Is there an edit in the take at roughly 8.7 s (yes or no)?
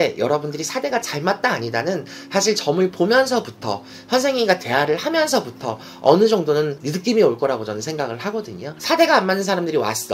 yes